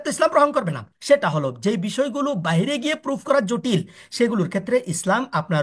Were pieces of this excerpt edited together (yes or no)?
yes